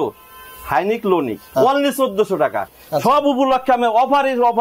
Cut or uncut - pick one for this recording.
cut